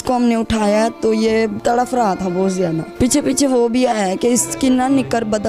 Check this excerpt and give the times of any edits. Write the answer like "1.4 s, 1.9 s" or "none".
1.6 s, 2.9 s